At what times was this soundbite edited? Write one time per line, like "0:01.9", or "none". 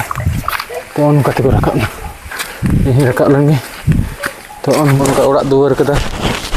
0:05.0